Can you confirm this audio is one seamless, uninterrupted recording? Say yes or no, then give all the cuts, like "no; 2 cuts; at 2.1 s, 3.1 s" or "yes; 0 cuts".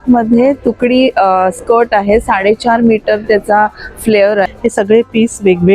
no; 1 cut; at 4.5 s